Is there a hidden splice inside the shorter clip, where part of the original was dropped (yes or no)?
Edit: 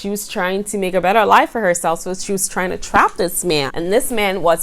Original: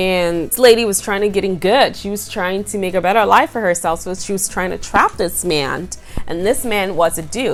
yes